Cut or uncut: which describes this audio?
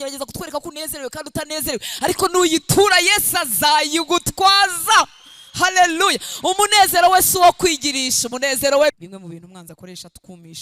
cut